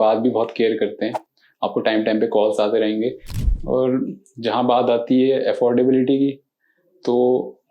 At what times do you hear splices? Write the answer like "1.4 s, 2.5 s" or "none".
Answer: 3.3 s

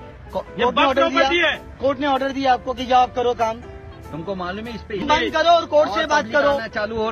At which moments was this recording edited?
5.0 s

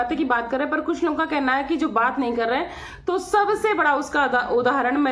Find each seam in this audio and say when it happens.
none

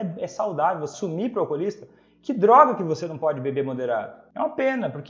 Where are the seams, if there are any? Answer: 0.9 s, 4.2 s

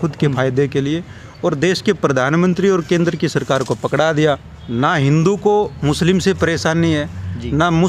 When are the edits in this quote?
4.5 s

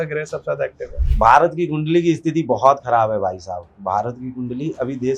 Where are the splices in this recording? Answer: 3.7 s

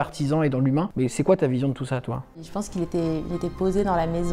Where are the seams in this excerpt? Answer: 0.9 s, 2.4 s

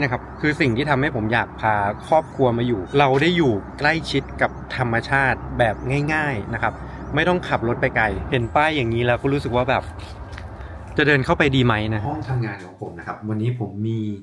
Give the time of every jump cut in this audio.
2.8 s, 8.2 s, 12.0 s

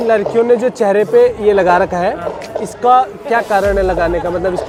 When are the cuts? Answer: none

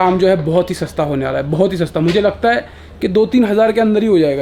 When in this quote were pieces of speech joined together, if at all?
none

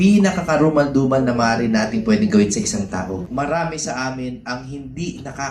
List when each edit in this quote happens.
3.2 s

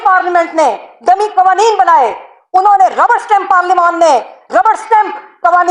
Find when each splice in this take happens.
none

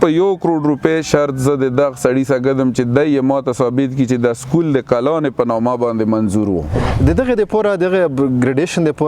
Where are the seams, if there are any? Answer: 6.8 s

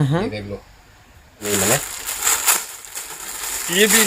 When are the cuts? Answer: 1.4 s

